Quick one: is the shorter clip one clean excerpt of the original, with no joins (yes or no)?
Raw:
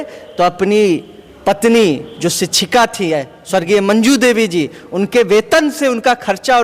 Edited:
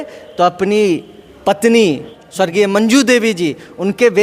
no